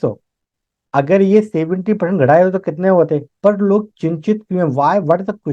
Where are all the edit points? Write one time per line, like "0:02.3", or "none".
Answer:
0:03.3